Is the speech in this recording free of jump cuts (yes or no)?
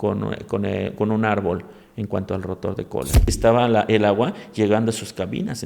no